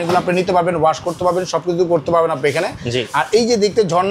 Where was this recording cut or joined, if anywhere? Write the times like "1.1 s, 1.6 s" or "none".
none